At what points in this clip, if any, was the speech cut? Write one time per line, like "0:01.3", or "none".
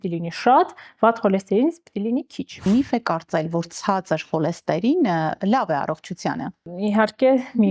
0:02.7
0:06.7